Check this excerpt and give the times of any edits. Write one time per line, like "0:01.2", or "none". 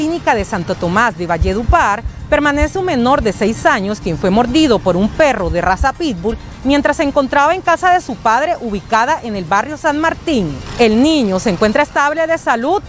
none